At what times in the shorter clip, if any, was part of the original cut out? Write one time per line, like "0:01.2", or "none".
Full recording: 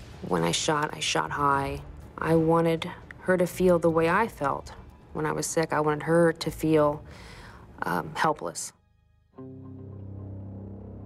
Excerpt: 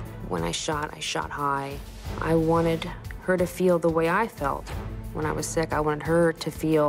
none